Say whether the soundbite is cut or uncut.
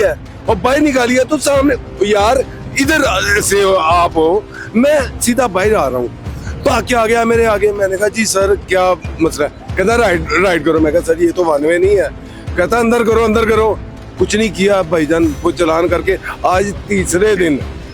uncut